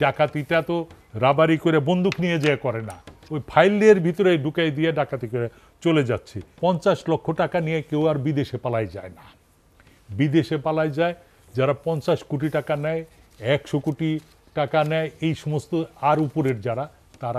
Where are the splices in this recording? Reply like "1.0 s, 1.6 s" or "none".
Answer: 6.4 s